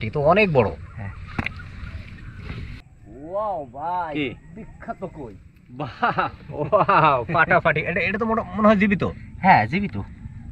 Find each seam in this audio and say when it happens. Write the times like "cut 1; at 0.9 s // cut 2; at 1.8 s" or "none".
cut 1; at 2.8 s